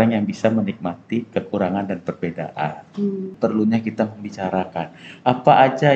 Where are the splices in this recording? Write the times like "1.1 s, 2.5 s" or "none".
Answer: 3.3 s